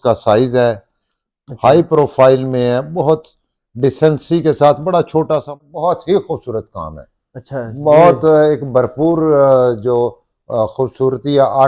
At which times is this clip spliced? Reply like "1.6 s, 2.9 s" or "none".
5.4 s